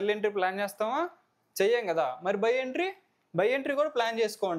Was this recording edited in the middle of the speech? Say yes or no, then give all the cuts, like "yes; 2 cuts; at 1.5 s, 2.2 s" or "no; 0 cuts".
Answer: no; 0 cuts